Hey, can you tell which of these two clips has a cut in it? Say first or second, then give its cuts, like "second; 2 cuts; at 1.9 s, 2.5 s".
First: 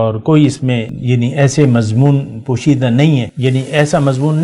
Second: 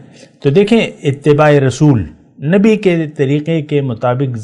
first; 2 cuts; at 0.9 s, 3.3 s